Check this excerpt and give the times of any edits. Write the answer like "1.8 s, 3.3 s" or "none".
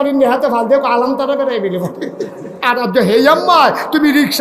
2.6 s